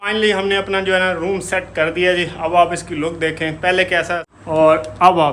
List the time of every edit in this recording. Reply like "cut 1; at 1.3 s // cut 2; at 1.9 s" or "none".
cut 1; at 4.3 s